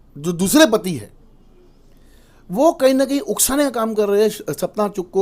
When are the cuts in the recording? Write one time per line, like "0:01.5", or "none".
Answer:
none